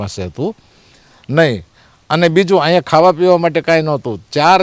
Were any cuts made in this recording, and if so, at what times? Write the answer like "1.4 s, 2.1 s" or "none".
none